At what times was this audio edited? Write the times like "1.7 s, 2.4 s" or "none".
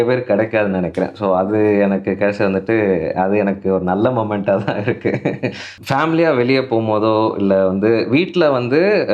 5.7 s